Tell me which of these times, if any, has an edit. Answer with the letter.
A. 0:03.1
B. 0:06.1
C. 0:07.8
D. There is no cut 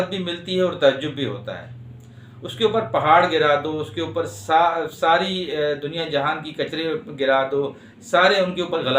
D